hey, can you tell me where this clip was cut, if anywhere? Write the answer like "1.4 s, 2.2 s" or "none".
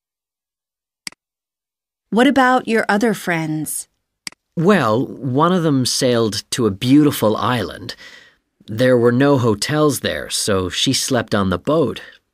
1.1 s